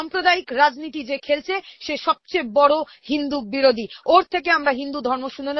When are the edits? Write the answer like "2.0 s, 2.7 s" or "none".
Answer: none